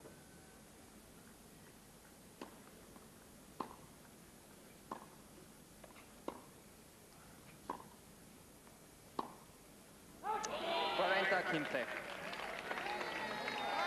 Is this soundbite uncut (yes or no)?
no